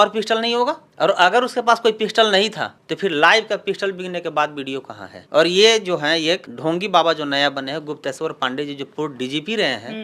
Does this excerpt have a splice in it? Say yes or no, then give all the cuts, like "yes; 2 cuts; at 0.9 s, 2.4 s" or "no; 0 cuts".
no; 0 cuts